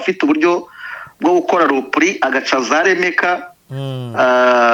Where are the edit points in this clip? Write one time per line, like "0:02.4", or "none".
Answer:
none